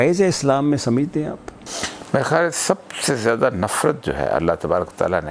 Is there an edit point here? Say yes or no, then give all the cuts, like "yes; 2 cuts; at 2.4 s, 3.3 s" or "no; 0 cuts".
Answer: no; 0 cuts